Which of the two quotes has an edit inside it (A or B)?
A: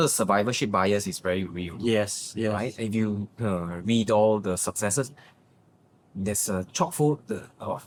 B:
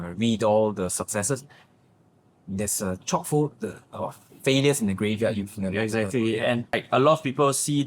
B